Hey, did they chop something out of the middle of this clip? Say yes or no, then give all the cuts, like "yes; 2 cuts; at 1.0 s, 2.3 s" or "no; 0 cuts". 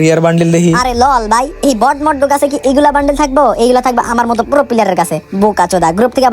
yes; 1 cut; at 5.2 s